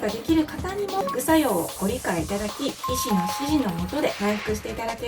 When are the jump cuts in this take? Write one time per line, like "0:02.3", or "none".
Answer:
0:01.0
0:02.9
0:04.2